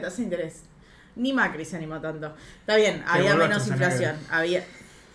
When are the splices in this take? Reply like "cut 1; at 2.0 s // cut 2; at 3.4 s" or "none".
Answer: none